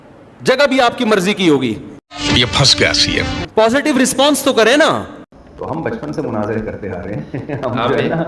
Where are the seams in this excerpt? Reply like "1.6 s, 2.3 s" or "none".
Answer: 5.1 s